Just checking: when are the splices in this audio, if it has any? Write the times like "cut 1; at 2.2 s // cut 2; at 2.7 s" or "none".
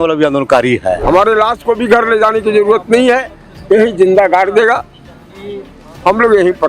cut 1; at 1.0 s